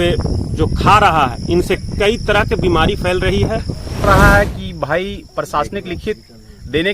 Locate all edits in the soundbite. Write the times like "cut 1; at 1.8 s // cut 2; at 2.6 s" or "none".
cut 1; at 4.0 s